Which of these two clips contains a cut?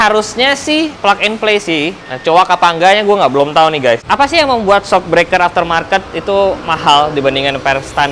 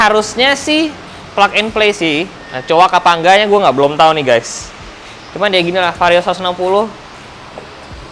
first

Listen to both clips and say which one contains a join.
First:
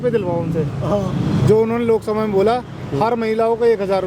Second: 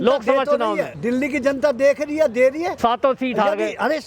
second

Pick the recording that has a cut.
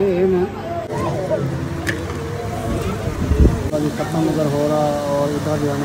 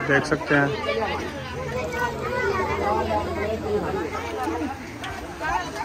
first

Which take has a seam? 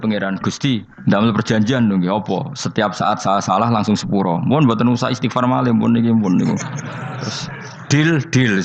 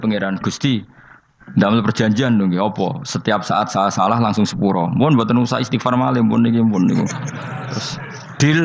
first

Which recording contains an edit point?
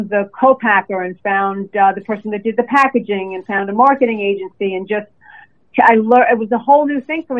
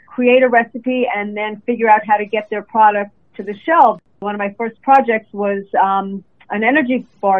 second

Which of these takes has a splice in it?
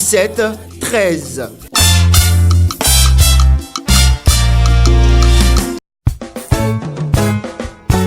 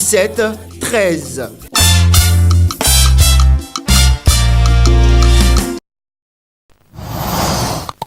first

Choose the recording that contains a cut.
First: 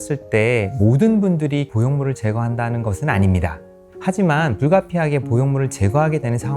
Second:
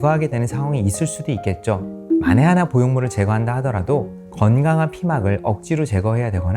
second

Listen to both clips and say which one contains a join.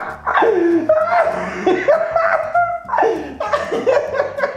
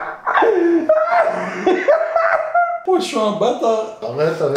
second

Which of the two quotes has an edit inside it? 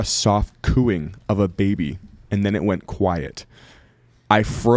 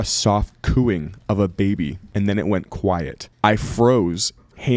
second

